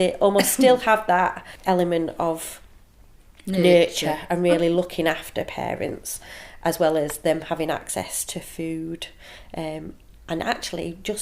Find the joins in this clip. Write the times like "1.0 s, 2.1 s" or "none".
1.5 s

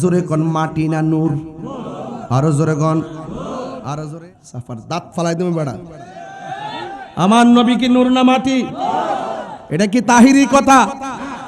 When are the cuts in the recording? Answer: 4.2 s

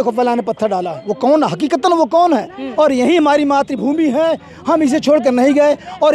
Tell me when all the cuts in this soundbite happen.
2.6 s

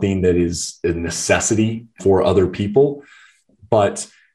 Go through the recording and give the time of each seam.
none

